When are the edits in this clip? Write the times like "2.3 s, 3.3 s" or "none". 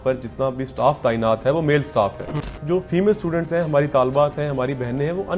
2.5 s